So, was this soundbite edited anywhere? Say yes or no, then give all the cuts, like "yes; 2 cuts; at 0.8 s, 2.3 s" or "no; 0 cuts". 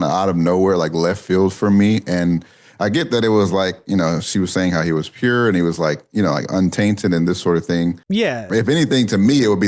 yes; 1 cut; at 8.0 s